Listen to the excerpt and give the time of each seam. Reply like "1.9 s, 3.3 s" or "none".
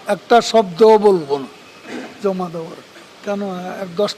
3.1 s